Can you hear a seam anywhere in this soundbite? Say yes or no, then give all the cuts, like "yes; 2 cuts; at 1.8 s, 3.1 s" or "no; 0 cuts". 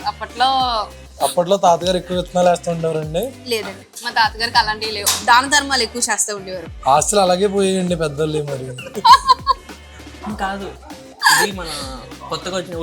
yes; 2 cuts; at 1.0 s, 8.9 s